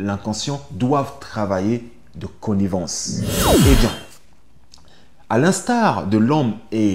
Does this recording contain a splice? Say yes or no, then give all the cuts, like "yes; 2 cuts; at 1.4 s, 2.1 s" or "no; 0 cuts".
yes; 1 cut; at 3.6 s